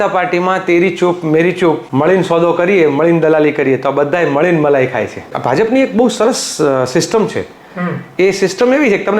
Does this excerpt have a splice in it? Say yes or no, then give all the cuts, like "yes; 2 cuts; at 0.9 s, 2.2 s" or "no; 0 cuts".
yes; 2 cuts; at 1.9 s, 5.3 s